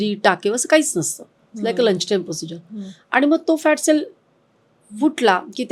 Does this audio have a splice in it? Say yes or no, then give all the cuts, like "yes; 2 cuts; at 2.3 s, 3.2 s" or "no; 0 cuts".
no; 0 cuts